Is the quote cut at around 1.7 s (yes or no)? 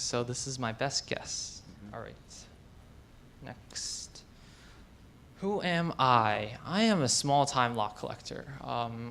no